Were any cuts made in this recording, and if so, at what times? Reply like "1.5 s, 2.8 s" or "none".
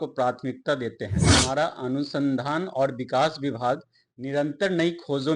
1.2 s